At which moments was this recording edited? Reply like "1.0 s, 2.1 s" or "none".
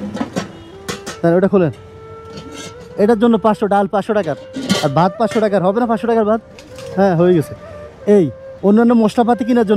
8.4 s